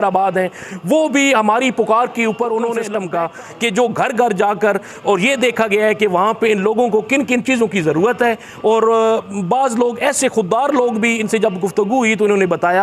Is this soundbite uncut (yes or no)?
no